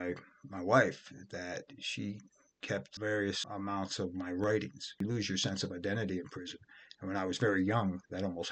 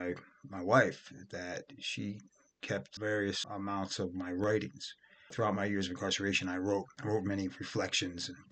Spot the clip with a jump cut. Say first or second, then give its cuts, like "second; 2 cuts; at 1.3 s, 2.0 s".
first; 1 cut; at 5.0 s